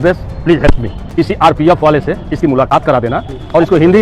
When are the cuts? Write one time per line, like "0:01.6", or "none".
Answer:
0:01.0

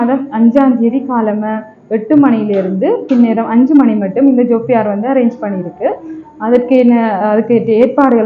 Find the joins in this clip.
none

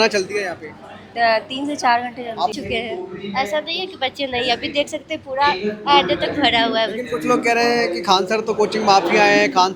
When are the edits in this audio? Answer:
0:02.5

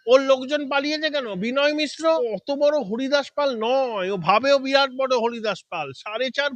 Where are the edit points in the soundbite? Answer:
0:02.2

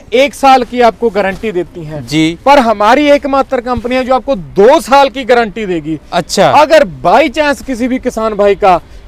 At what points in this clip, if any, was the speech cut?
none

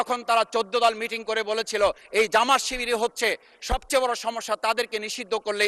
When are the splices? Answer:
none

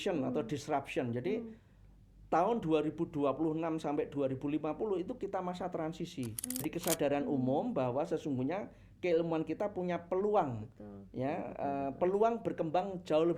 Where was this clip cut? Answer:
0:06.6

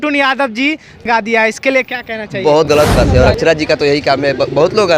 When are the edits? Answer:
0:01.1
0:02.7

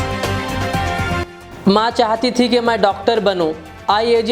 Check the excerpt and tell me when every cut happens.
0:01.4

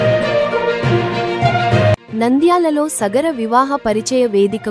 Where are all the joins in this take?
0:02.0

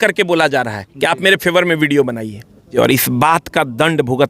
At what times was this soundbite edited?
0:02.6

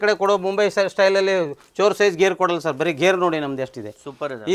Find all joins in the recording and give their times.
none

